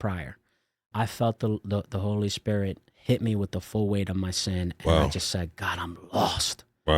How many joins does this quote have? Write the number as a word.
one